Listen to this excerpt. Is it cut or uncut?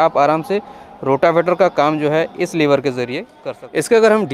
cut